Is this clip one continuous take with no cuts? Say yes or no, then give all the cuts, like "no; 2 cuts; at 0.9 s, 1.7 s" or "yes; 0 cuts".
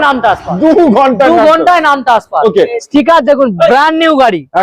no; 1 cut; at 2.8 s